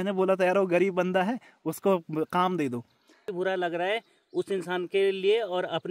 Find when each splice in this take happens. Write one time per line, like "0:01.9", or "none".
0:03.3